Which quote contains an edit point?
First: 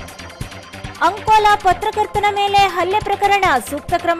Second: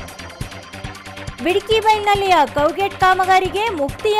first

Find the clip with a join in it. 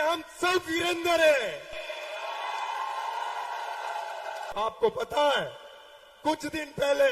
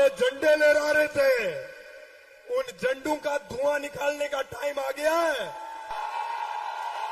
first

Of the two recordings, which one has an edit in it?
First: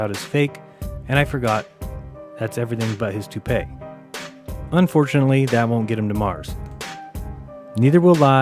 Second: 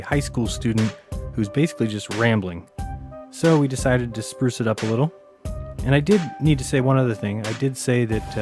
first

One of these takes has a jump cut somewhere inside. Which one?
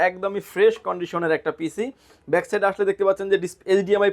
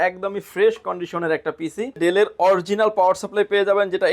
second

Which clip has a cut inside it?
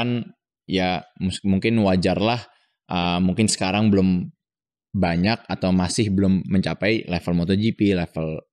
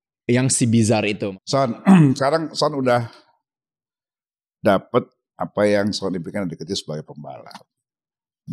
second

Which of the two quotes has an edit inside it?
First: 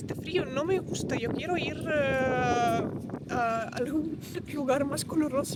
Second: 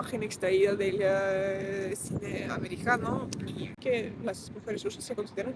second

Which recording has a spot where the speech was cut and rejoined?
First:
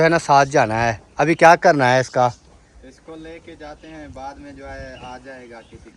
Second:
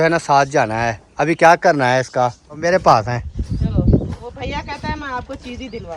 second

